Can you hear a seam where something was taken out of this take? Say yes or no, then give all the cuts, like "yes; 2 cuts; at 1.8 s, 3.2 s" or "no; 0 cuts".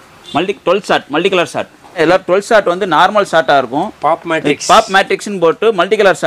yes; 1 cut; at 2.0 s